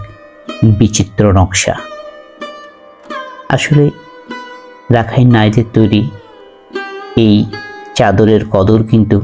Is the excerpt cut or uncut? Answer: uncut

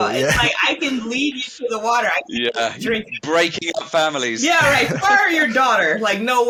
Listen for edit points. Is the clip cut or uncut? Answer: uncut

